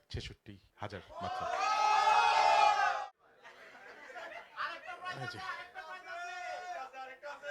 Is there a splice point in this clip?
yes; 1 cut; at 2.9 s

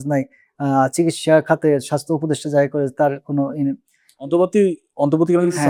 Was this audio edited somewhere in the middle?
no; 0 cuts

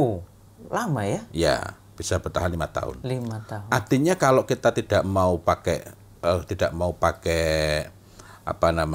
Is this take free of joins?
yes; 0 cuts

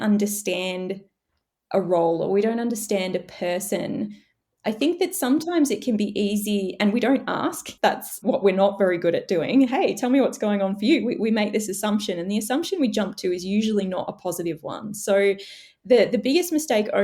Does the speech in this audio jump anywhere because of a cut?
no; 0 cuts

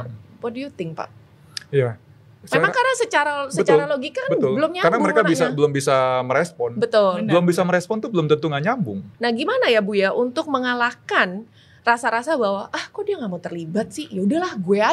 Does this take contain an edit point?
yes; 1 cut; at 9.1 s

